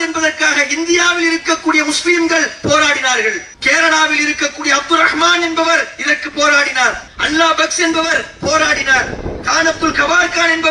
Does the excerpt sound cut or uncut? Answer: cut